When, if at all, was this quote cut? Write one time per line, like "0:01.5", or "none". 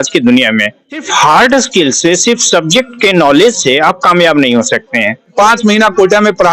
0:01.1
0:05.3